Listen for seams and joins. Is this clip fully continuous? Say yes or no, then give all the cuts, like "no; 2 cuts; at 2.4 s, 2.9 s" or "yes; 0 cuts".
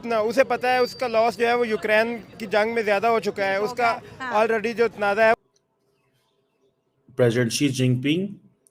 no; 1 cut; at 5.4 s